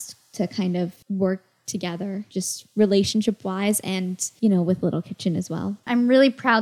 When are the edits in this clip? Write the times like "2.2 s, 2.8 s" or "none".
1.0 s, 2.3 s, 4.2 s, 5.9 s